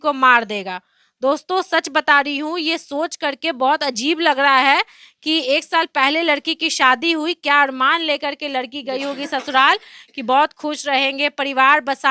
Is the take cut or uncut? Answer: uncut